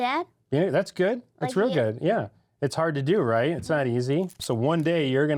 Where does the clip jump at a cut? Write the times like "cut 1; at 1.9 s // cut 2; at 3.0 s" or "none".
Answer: cut 1; at 4.4 s